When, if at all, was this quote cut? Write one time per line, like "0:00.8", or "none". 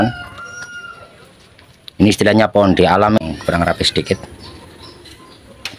0:03.2